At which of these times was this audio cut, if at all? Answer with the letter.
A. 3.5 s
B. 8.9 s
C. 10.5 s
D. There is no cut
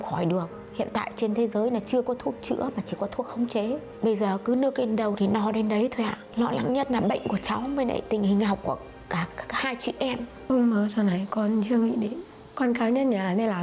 C